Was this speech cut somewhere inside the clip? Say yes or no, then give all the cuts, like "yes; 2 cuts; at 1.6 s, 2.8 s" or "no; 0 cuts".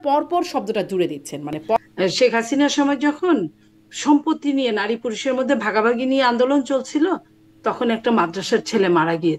yes; 1 cut; at 1.8 s